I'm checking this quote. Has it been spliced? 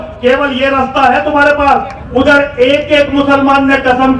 yes; 1 cut; at 2.0 s

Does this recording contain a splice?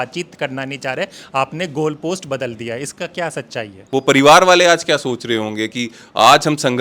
yes; 1 cut; at 3.8 s

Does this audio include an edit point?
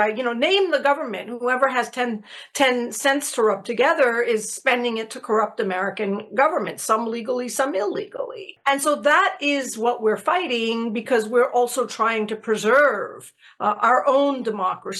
no; 0 cuts

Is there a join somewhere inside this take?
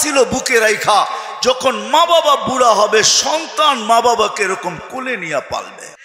no; 0 cuts

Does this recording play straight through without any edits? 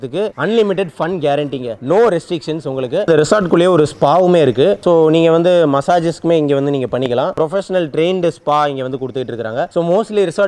yes; 0 cuts

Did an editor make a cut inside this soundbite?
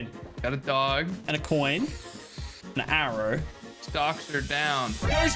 no; 0 cuts

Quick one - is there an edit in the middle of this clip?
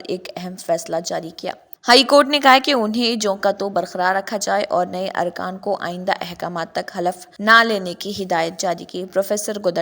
yes; 2 cuts; at 1.7 s, 7.3 s

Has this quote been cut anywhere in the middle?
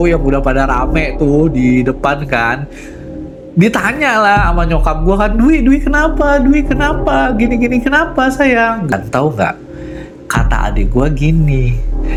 no; 0 cuts

